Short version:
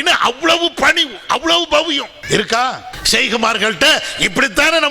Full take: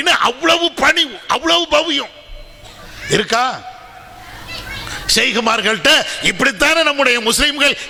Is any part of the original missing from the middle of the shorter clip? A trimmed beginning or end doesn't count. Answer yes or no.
yes